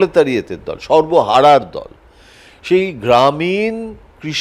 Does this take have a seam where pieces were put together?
no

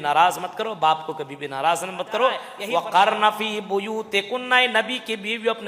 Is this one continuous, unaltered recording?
no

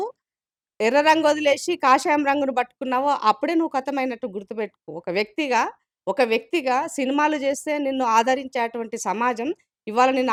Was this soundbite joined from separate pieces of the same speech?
no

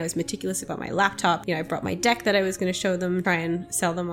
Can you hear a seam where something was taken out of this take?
yes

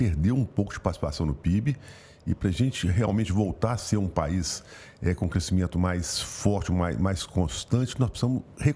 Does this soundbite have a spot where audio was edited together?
no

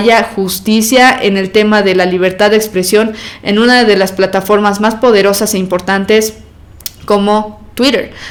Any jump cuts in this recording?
no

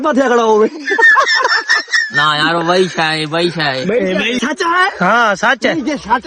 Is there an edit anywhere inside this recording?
yes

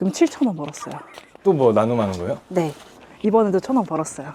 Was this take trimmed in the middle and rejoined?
no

